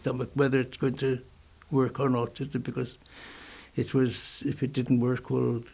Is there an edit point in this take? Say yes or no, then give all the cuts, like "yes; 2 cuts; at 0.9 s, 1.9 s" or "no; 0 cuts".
no; 0 cuts